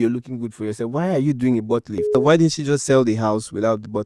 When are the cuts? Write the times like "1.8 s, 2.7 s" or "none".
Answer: 2.1 s